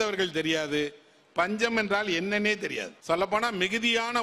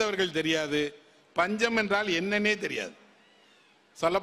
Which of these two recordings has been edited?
first; 1 cut; at 2.9 s

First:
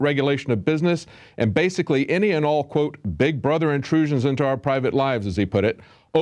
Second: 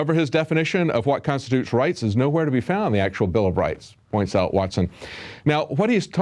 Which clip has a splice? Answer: first; 1 cut; at 3.2 s

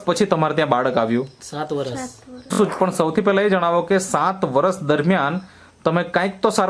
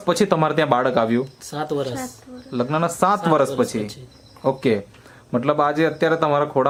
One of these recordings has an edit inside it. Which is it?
first; 1 cut; at 2.5 s

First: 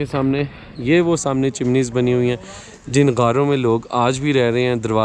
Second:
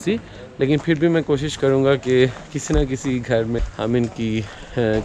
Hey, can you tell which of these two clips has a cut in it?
second; 1 cut; at 3.7 s

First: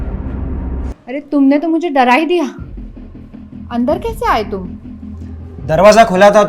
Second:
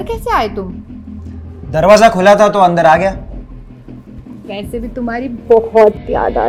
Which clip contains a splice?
first; 1 cut; at 0.9 s

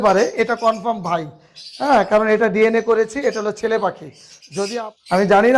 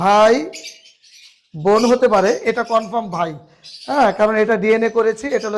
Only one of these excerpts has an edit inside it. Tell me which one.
first; 1 cut; at 4.7 s

